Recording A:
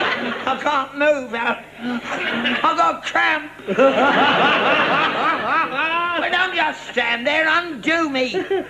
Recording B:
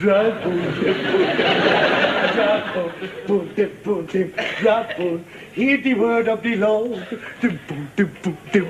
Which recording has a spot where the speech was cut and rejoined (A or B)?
A